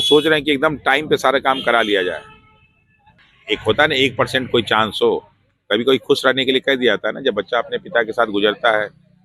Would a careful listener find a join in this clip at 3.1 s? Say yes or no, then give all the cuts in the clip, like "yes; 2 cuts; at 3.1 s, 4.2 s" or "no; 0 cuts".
yes; 1 cut; at 3.1 s